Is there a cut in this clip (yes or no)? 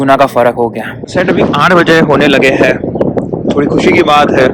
yes